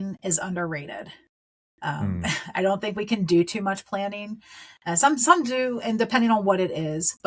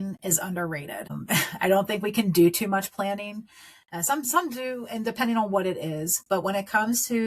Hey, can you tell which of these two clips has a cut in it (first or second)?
second